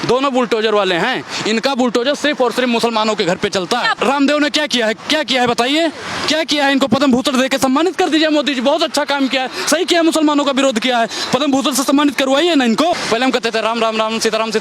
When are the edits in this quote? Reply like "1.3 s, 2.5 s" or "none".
3.9 s, 13.0 s